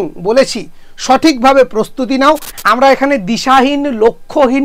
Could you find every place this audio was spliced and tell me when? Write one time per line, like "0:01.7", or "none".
0:02.5

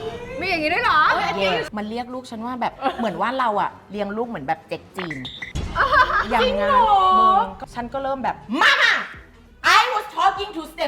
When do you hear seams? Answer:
0:01.7
0:02.8
0:07.6

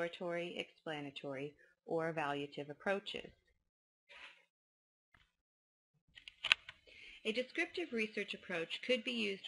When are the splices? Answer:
0:02.5

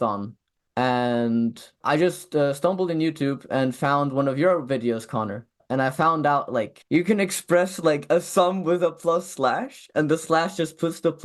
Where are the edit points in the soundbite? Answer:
0:01.8

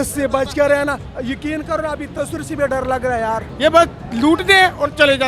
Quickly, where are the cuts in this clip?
0:01.1
0:03.5

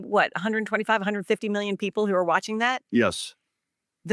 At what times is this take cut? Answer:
none

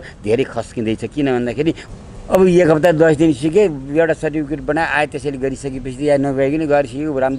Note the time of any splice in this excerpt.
0:01.8

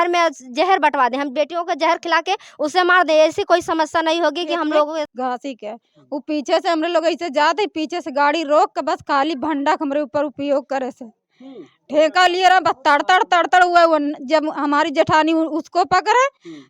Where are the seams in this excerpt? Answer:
0:05.1

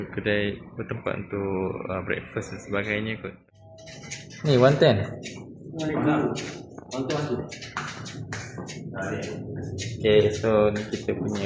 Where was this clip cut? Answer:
0:03.3

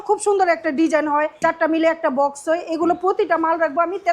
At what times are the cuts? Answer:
0:01.3

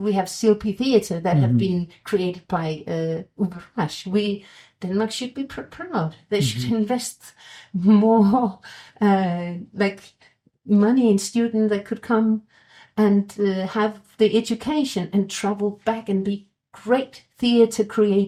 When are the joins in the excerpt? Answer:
none

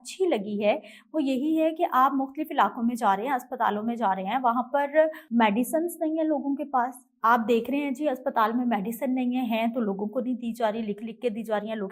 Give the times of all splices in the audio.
0:05.2

